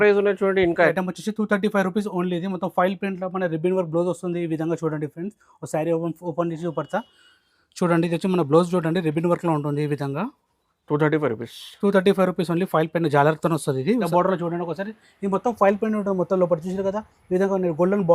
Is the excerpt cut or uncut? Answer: cut